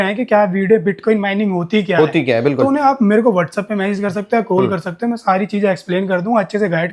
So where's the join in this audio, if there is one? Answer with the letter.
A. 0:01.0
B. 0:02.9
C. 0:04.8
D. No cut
D